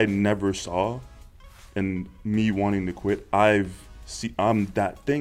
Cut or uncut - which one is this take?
uncut